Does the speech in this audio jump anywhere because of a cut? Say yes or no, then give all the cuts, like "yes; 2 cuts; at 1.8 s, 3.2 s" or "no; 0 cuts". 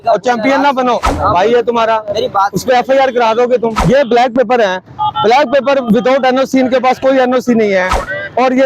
yes; 2 cuts; at 1.0 s, 3.8 s